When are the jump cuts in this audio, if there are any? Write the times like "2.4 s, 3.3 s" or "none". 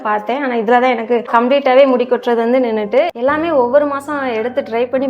3.1 s